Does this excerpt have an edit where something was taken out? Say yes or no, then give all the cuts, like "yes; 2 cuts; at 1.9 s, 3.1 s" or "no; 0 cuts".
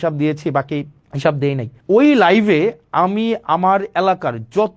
yes; 2 cuts; at 1.0 s, 1.7 s